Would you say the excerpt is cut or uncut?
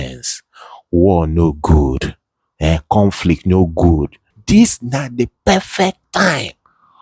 cut